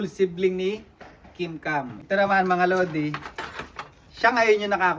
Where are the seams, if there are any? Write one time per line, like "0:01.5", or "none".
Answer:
0:02.0